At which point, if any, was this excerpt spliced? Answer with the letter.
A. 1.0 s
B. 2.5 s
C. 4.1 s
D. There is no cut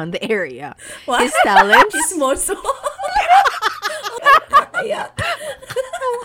C